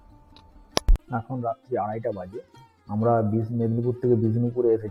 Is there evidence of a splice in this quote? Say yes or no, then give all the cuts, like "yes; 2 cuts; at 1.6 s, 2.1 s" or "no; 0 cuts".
no; 0 cuts